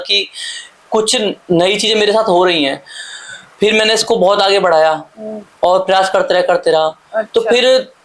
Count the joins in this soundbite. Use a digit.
0